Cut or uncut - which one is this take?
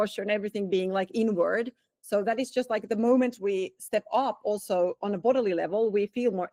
uncut